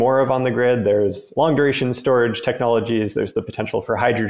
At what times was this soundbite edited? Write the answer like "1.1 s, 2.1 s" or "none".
1.3 s

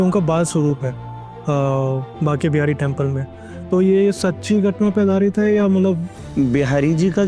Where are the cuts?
6.2 s

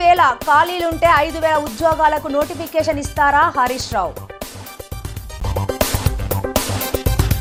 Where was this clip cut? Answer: none

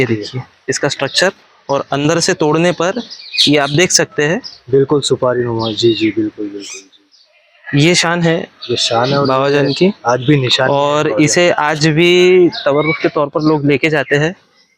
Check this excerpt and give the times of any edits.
none

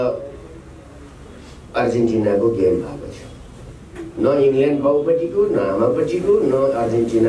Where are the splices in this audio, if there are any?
none

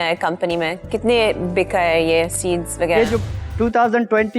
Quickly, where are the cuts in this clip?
3.3 s

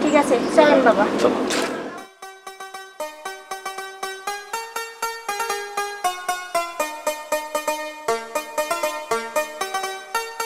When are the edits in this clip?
2.0 s

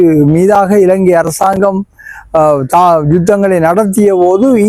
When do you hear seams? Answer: none

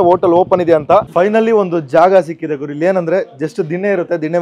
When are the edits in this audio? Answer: 1.1 s

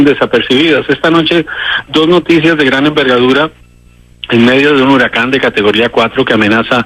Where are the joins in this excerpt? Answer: 4.4 s

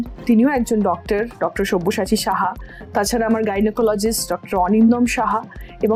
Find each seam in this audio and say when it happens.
none

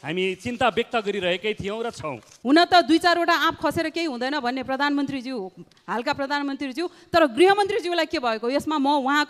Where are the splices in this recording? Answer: 2.3 s

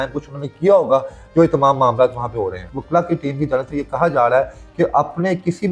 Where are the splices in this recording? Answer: 2.7 s

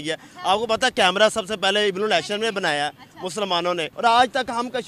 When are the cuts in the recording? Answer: 3.9 s

